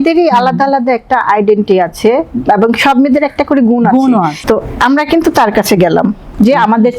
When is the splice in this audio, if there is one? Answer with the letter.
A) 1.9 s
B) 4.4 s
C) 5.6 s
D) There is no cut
B